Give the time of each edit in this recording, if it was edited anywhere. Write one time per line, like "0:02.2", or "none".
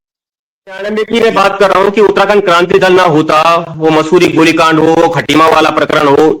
0:00.9